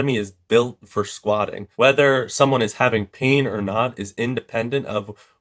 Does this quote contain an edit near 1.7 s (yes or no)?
yes